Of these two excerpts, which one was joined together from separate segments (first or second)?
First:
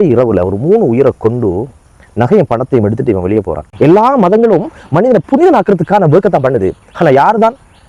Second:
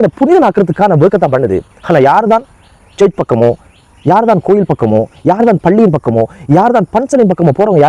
first